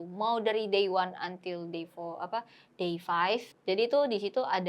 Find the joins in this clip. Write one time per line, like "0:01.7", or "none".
0:03.5